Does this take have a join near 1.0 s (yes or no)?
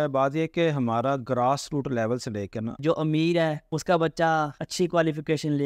no